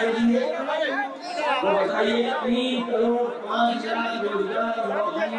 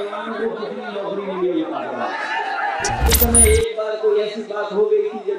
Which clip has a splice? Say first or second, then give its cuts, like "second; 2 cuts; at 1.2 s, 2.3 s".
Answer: second; 1 cut; at 3.1 s